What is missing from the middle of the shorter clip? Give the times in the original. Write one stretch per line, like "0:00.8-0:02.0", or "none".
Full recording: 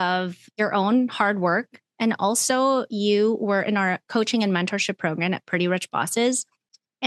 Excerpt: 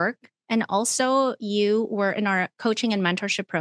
none